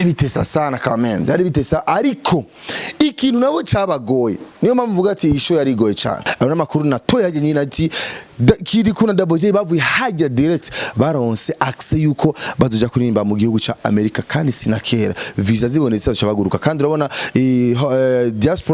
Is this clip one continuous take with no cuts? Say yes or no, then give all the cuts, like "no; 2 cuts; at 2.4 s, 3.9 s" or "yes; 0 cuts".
no; 1 cut; at 6.2 s